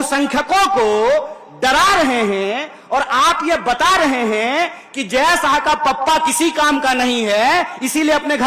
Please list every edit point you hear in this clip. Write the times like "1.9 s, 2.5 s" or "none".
none